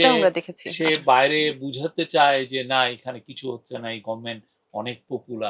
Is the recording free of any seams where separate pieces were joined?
yes; 0 cuts

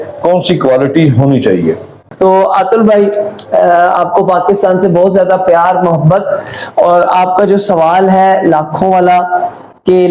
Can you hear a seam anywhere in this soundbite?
yes; 1 cut; at 2.0 s

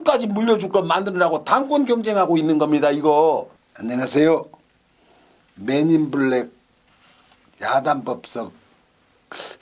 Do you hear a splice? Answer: yes; 1 cut; at 3.6 s

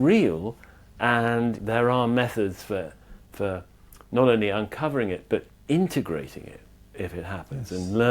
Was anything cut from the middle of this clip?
yes; 1 cut; at 1.6 s

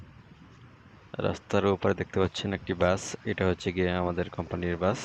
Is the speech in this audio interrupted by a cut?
no; 0 cuts

